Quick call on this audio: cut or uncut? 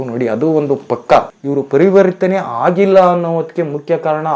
cut